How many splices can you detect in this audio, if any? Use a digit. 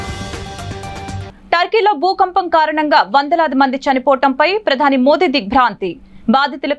1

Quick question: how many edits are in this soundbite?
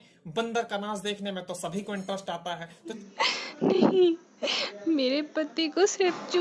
1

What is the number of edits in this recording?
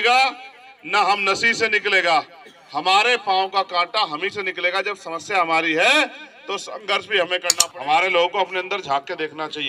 1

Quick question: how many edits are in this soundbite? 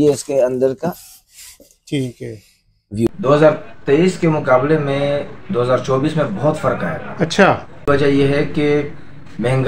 2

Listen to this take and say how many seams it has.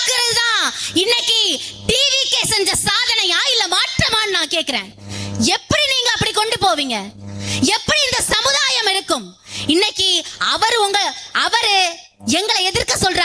0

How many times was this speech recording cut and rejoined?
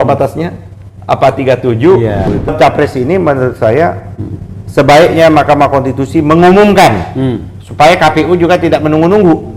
1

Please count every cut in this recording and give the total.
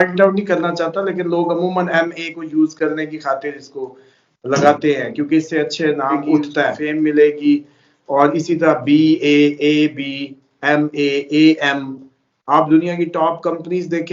1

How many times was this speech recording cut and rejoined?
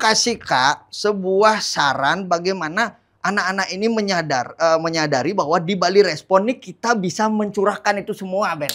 0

